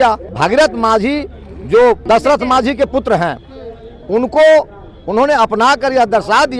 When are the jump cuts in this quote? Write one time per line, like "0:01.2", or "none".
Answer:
0:02.0